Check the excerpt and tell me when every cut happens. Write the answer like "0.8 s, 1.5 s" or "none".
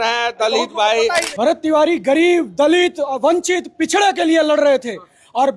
1.3 s